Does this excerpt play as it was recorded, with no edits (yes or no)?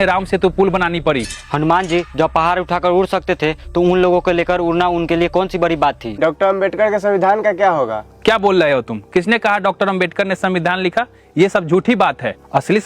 no